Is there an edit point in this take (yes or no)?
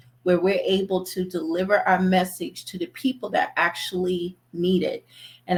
no